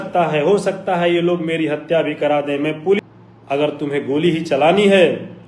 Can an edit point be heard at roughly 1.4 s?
no; 1 cut; at 3.0 s

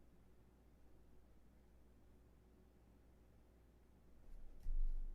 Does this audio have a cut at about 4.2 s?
yes; 1 cut; at 4.2 s

